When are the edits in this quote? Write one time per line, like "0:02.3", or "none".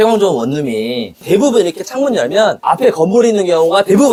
none